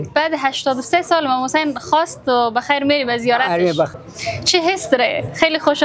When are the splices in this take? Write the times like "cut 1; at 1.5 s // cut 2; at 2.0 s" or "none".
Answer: cut 1; at 3.9 s